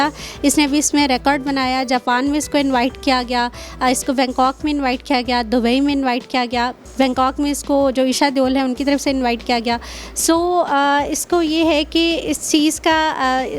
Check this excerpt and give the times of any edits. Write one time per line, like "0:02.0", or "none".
none